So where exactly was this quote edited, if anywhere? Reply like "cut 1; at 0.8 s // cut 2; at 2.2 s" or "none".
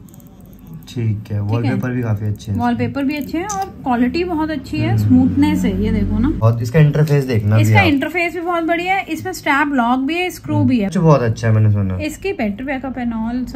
cut 1; at 6.4 s // cut 2; at 10.9 s